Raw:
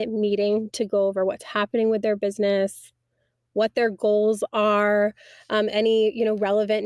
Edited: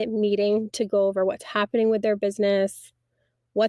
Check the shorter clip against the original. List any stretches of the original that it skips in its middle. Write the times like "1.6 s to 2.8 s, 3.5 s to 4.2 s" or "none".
none